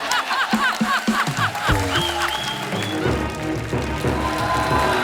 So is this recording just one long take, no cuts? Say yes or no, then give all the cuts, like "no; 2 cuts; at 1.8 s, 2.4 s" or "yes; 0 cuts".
no; 1 cut; at 2.6 s